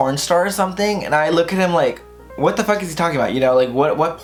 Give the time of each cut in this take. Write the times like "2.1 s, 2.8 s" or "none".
none